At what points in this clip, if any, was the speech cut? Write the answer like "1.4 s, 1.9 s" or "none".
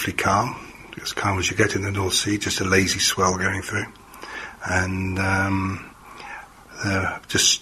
none